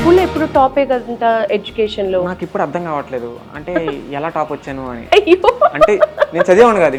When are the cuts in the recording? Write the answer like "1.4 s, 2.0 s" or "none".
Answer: none